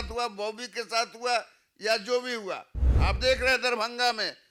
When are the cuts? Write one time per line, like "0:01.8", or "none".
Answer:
none